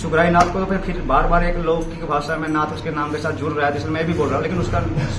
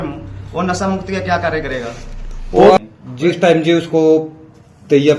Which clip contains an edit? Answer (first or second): second